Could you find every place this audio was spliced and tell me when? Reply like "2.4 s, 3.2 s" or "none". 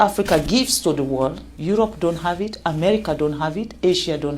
1.5 s